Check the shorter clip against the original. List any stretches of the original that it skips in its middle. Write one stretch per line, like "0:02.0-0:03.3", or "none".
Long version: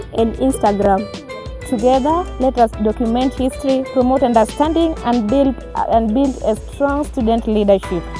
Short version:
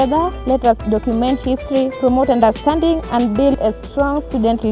0:05.5-0:06.4